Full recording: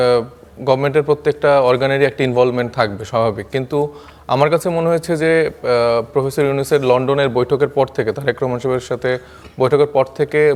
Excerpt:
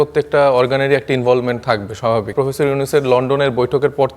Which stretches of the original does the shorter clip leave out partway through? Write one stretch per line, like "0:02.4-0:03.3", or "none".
0:03.4-0:06.1